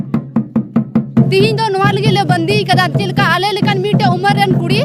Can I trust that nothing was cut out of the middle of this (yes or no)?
no